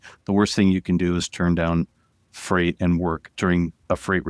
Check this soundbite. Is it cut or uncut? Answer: cut